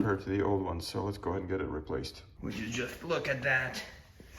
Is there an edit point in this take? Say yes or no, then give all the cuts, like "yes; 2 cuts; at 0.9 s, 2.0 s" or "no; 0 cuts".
yes; 1 cut; at 2.2 s